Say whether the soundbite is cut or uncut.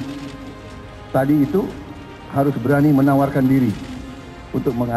uncut